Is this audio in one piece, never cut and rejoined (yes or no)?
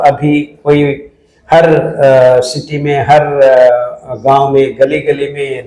yes